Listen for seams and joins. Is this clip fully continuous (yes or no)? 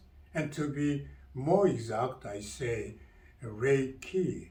yes